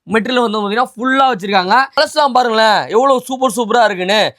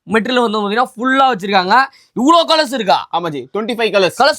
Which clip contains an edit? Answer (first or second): first